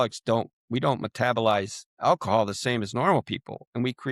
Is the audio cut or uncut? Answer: cut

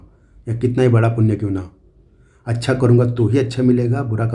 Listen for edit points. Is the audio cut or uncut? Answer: uncut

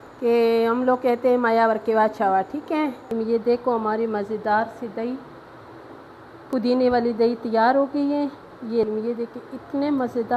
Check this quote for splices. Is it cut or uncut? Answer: cut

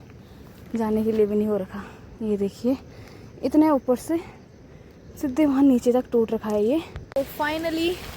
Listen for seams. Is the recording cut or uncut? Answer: cut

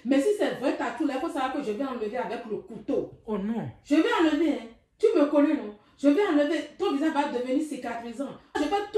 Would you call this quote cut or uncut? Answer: uncut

